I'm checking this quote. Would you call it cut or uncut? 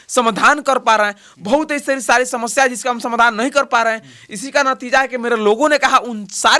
uncut